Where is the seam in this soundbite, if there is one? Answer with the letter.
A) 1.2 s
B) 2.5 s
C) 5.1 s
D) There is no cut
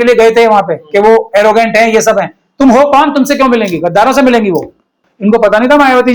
C